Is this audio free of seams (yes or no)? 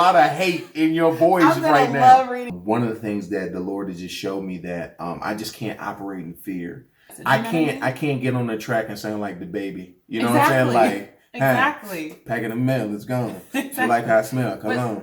no